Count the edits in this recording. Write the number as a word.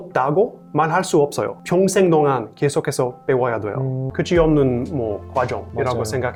zero